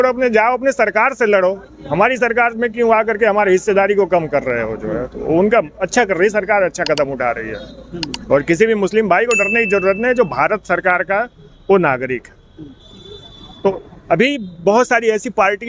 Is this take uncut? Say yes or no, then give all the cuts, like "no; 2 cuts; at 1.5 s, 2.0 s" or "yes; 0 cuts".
yes; 0 cuts